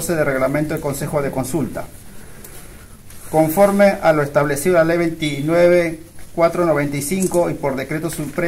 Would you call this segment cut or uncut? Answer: uncut